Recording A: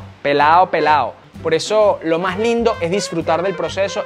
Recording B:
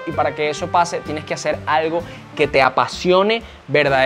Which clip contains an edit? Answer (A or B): A